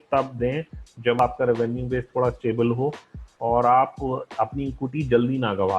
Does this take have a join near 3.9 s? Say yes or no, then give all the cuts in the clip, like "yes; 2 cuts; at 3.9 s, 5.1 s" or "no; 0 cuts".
no; 1 cut; at 1.2 s